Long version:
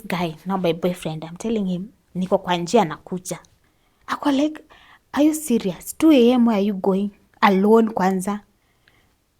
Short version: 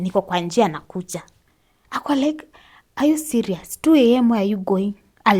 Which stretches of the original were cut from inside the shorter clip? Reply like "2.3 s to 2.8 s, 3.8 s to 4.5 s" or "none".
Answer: none